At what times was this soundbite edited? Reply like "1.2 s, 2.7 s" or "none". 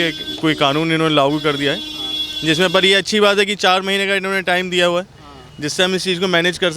none